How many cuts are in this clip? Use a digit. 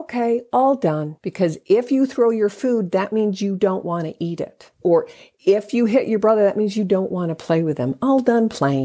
2